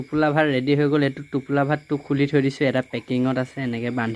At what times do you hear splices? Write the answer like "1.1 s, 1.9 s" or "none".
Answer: none